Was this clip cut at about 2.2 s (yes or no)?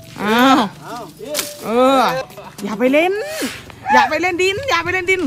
yes